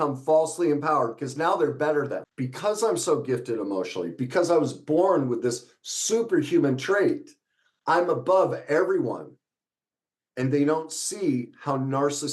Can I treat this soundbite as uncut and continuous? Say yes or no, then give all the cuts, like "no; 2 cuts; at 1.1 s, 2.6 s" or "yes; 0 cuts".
no; 1 cut; at 2.3 s